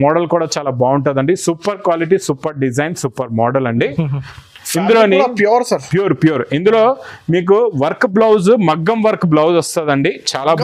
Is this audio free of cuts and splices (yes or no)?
yes